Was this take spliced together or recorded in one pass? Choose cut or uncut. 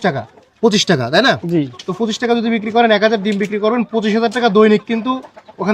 uncut